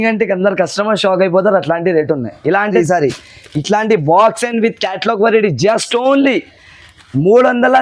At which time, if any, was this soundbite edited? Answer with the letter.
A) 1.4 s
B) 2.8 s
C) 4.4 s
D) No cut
B